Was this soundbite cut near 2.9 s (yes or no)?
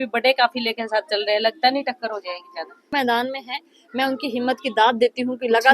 yes